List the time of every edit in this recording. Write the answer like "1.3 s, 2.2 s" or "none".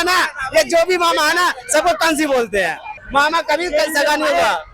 2.9 s